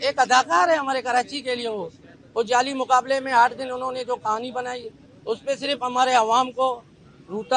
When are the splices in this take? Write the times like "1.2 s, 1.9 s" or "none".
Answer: none